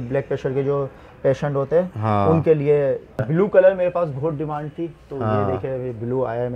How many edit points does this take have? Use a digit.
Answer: 1